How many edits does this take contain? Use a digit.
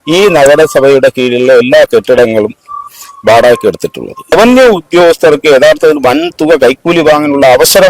1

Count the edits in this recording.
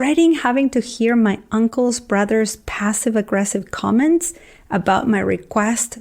0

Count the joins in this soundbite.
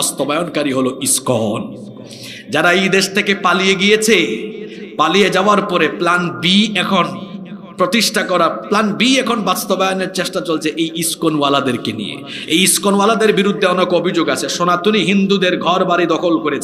0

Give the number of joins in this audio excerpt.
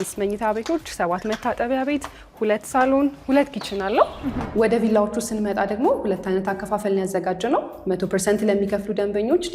1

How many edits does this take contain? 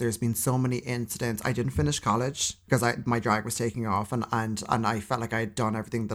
1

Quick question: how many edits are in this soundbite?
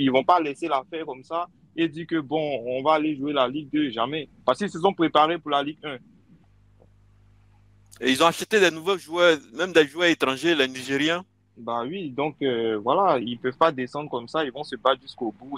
0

